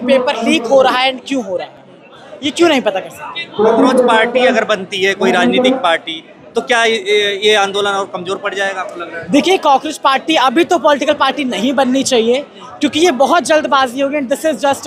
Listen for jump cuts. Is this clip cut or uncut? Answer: uncut